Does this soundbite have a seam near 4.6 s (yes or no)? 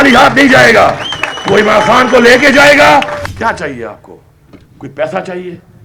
no